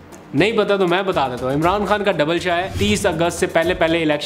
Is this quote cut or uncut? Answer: cut